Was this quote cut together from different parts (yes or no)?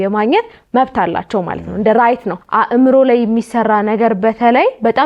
yes